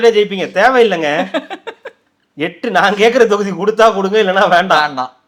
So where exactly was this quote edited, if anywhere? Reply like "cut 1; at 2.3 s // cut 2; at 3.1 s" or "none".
none

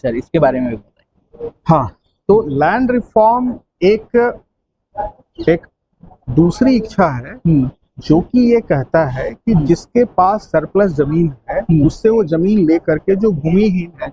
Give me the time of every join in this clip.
none

